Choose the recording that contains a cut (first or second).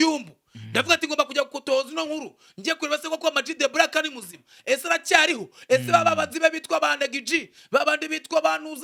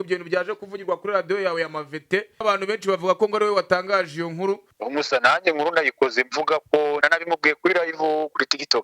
second